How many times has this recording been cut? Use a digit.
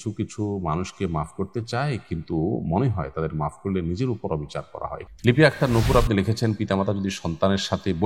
1